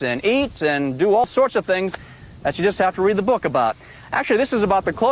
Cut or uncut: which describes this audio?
cut